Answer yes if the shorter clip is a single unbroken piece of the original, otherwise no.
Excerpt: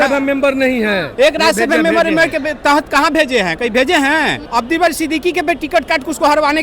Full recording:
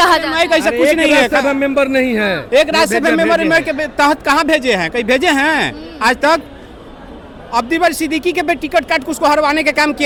no